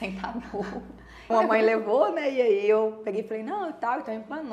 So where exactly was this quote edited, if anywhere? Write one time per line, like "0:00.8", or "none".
0:01.3

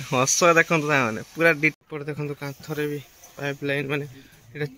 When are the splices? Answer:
0:01.8

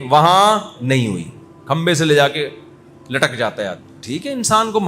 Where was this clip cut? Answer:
0:03.9

